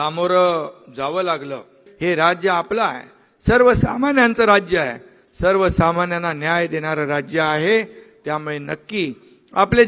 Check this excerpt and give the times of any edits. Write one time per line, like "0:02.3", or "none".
0:01.8

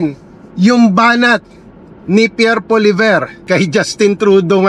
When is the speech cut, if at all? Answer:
0:03.3

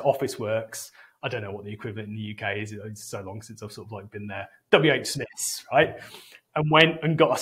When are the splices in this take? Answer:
none

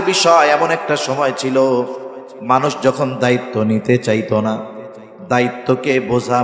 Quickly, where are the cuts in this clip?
none

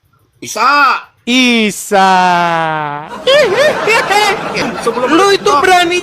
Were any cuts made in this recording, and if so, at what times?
0:04.6

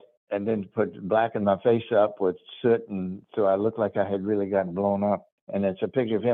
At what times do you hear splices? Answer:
0:05.3

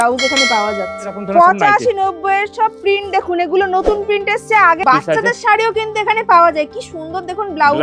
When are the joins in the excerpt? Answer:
0:01.2
0:04.8

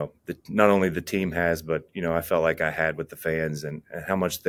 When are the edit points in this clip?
none

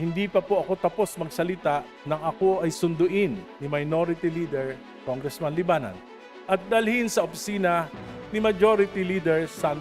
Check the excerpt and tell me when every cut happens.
0:02.8
0:03.5

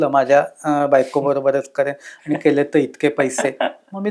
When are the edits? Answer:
none

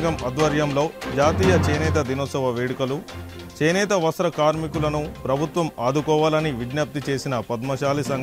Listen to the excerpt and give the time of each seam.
none

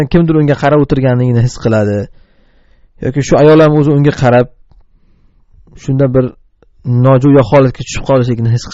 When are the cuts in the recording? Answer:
none

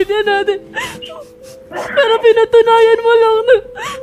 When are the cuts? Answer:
none

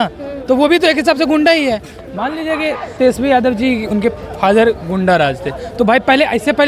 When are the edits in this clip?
none

